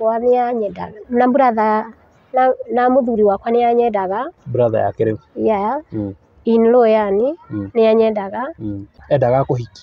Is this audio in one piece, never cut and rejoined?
no; 1 cut; at 8.9 s

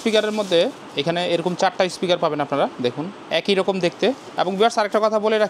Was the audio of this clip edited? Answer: yes; 2 cuts; at 3.1 s, 4.2 s

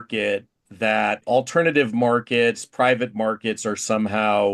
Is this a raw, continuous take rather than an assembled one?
no; 1 cut; at 1.2 s

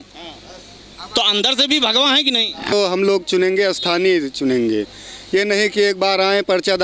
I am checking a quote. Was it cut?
yes; 1 cut; at 2.7 s

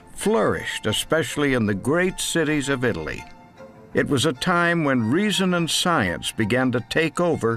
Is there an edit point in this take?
yes; 1 cut; at 3.1 s

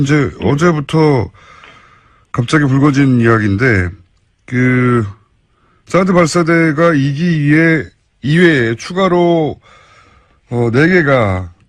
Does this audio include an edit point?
no; 0 cuts

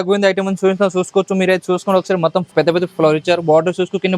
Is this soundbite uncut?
no; 1 cut; at 2.5 s

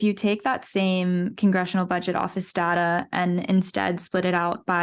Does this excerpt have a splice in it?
no; 0 cuts

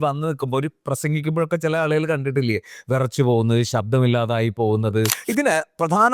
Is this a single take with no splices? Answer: no; 1 cut; at 5.2 s

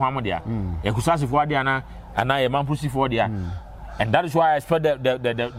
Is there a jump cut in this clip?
no; 0 cuts

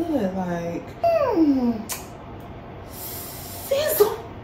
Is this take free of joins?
no; 1 cut; at 1.0 s

